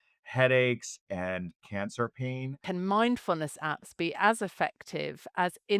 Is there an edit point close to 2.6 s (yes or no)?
yes